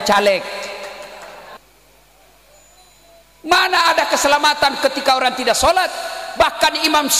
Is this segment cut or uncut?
cut